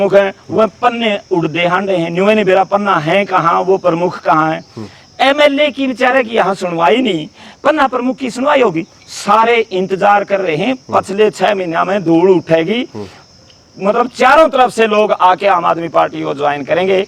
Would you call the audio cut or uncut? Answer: uncut